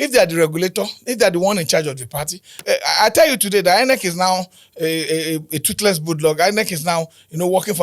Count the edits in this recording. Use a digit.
1